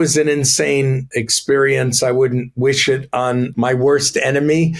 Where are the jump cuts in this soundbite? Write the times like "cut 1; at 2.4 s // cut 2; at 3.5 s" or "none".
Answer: cut 1; at 1.1 s // cut 2; at 3.5 s